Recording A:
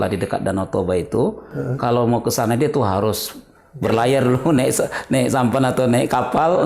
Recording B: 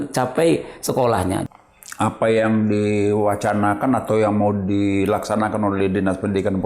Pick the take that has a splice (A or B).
B